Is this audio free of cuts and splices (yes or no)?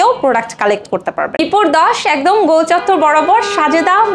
no